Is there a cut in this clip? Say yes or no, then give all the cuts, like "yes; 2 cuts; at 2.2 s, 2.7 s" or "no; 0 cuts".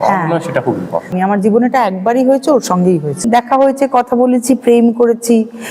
yes; 2 cuts; at 1.1 s, 3.3 s